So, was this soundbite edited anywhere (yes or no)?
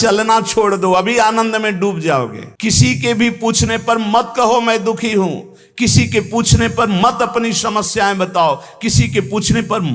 yes